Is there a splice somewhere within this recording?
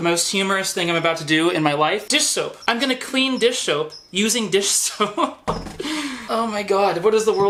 no; 0 cuts

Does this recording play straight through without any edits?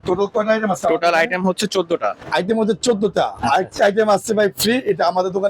no; 1 cut; at 2.2 s

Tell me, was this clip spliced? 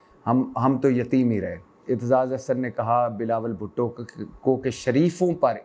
yes; 1 cut; at 1.7 s

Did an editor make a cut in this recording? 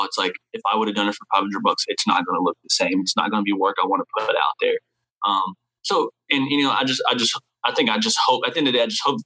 no; 0 cuts

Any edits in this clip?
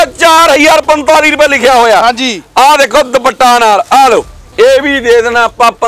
no; 0 cuts

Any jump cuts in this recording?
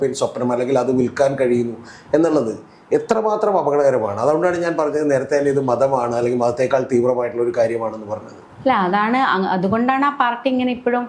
no; 0 cuts

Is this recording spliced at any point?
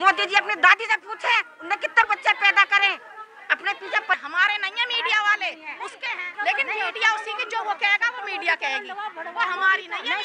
yes; 2 cuts; at 4.2 s, 6.3 s

